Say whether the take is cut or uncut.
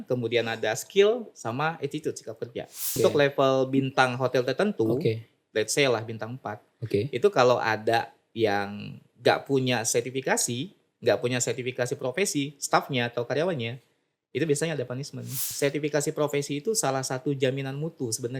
cut